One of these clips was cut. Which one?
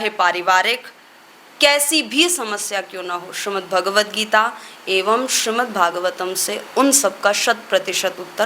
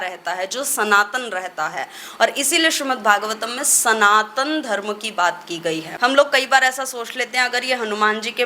second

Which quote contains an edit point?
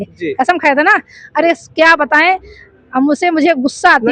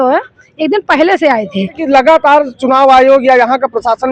second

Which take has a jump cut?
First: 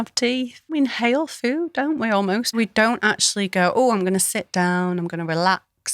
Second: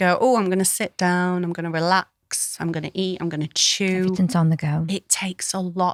first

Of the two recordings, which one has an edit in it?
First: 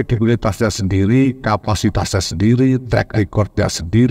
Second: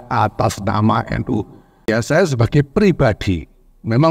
second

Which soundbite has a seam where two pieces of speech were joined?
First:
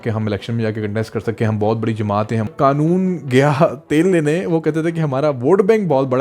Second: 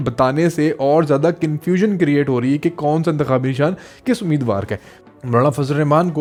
first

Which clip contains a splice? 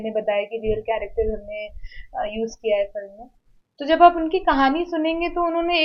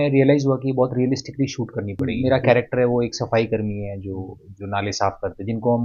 second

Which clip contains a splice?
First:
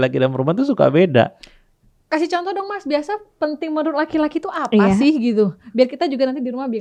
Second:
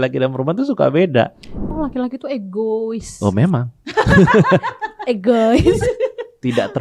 second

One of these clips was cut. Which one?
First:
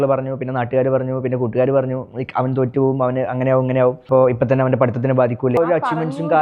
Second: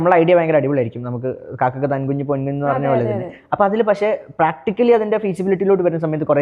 first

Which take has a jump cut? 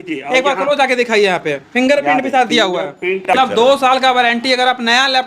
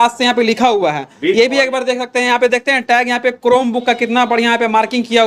first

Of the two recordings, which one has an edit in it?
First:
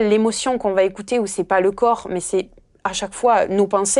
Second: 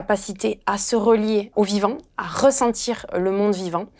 second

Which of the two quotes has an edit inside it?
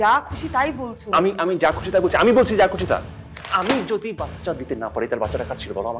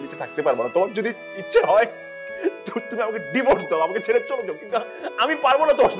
first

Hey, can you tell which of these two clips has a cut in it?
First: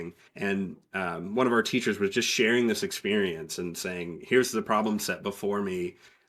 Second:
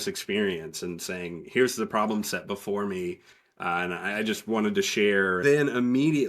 second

